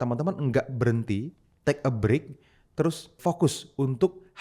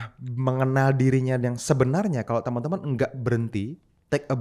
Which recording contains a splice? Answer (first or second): first